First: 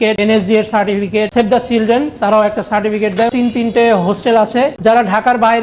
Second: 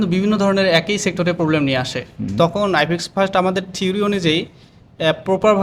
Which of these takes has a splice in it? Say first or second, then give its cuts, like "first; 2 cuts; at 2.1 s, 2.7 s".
first; 2 cuts; at 1.3 s, 3.3 s